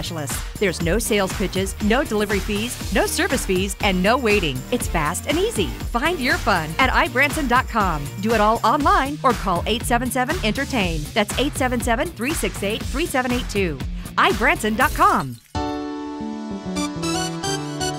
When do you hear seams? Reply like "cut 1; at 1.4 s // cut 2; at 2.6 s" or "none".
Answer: cut 1; at 15.4 s